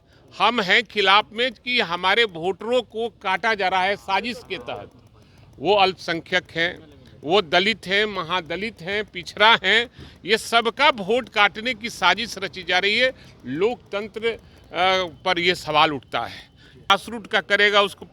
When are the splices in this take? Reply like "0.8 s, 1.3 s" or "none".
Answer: 16.9 s

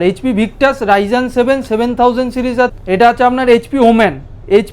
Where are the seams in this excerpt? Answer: 2.7 s

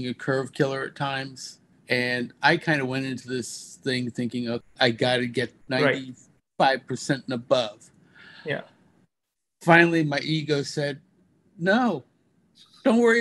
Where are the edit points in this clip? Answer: 1.7 s, 4.6 s, 5.6 s

